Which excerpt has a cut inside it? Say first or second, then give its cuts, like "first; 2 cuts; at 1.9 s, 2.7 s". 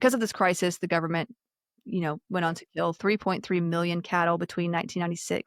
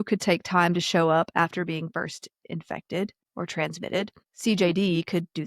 second; 2 cuts; at 3.2 s, 4.2 s